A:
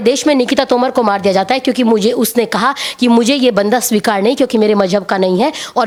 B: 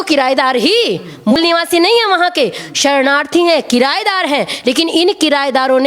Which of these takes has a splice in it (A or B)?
B